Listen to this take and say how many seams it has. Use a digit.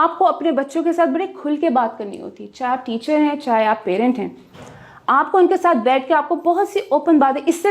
0